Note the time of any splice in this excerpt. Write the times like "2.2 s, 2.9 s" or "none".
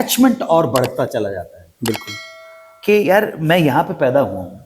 none